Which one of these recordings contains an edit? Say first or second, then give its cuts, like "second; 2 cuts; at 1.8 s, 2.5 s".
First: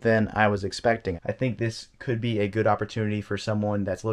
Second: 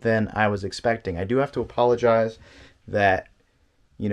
first; 1 cut; at 1.1 s